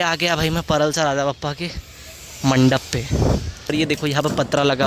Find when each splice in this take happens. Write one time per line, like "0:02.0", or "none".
0:03.7